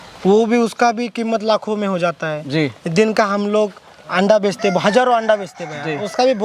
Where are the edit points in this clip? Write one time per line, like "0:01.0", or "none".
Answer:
none

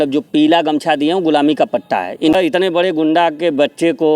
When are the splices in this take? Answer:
0:02.4

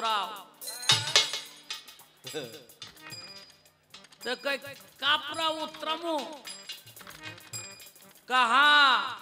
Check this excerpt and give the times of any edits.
none

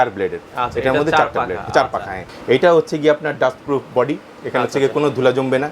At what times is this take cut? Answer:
0:02.3

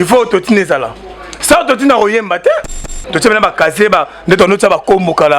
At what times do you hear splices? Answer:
0:03.0

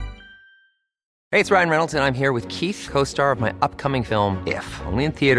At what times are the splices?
0:01.1

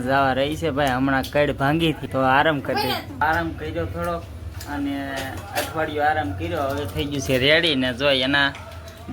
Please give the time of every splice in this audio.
0:02.0
0:03.2

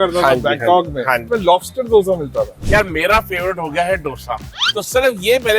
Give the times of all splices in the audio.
0:01.2
0:02.6

